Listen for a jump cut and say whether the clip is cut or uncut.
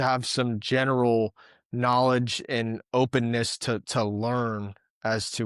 uncut